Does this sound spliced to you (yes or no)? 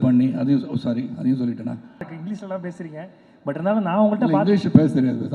yes